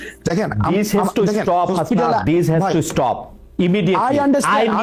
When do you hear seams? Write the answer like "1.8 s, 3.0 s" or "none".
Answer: none